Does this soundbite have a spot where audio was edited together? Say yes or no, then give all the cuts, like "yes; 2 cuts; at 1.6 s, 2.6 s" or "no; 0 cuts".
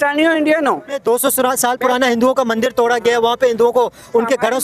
yes; 1 cut; at 1.0 s